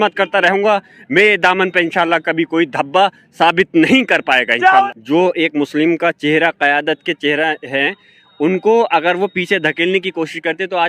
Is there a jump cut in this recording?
yes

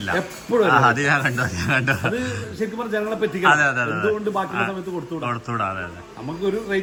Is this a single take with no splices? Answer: yes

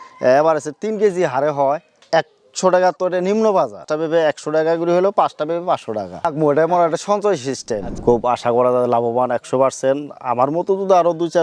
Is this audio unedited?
no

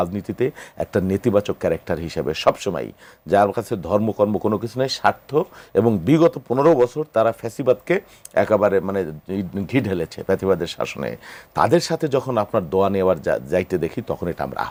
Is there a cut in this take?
no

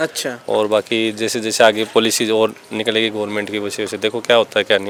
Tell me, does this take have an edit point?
no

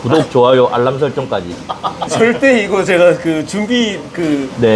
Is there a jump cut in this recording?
no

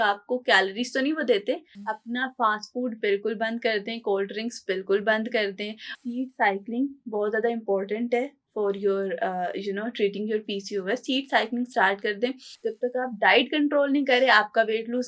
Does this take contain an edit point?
yes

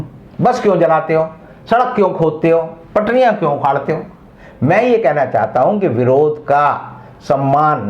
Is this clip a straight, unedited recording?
yes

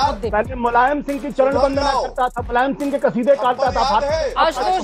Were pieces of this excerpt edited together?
no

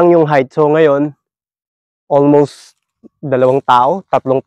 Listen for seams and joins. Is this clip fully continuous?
yes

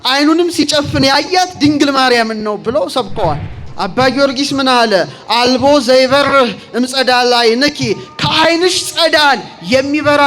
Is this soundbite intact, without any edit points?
no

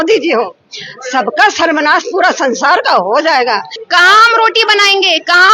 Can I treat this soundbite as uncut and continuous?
no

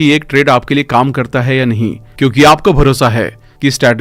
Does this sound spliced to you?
no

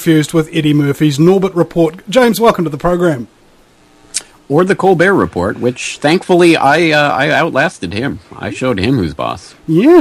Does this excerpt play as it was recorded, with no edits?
yes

